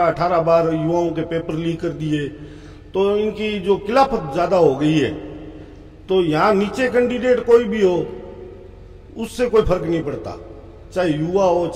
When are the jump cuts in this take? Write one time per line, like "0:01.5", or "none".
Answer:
none